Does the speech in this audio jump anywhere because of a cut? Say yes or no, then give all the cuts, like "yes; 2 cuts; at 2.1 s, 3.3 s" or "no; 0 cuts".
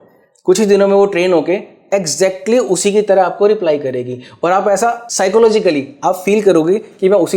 yes; 1 cut; at 5.1 s